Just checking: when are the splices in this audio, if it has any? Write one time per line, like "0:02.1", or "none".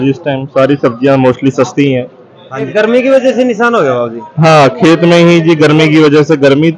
0:02.7